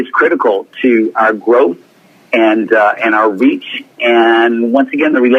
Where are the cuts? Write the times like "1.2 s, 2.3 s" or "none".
none